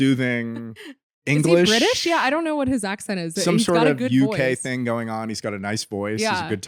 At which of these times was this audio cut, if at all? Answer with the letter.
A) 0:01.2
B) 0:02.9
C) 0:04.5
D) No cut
D